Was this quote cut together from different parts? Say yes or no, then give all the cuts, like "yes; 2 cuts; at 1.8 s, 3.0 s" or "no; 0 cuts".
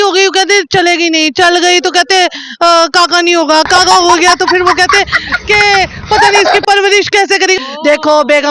yes; 1 cut; at 7.6 s